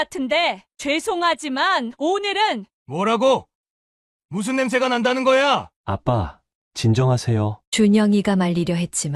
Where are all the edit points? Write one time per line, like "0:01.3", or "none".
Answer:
0:05.7
0:07.2